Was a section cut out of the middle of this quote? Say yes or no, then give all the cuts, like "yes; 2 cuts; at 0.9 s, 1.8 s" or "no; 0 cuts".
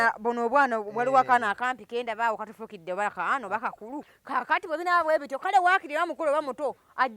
yes; 1 cut; at 4.1 s